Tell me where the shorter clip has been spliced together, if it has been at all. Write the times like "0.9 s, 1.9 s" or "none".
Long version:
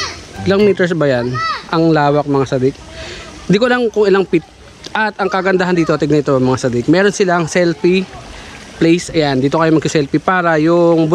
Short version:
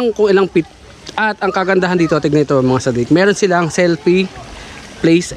none